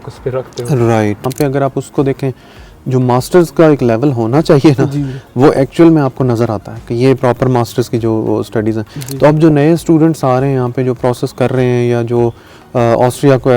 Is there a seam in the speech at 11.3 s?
no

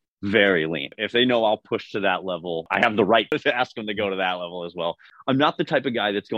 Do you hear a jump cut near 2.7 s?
yes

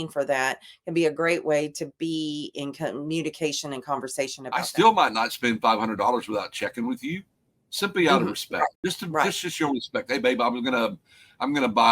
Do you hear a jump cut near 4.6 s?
yes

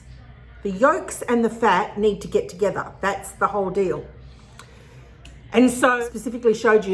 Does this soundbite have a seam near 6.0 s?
yes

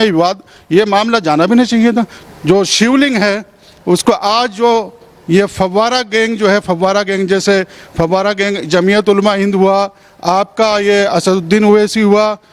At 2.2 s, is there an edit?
yes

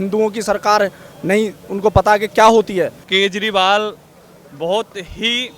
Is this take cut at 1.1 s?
no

